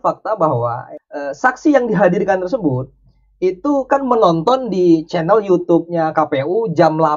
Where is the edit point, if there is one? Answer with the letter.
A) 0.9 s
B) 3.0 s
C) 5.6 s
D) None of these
A